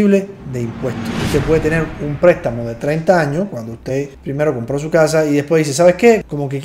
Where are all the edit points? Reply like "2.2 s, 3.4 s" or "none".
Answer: 1.2 s